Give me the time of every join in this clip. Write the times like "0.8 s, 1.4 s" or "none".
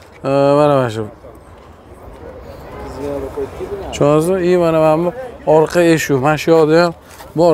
none